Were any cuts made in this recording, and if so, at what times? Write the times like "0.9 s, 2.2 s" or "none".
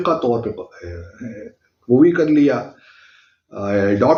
none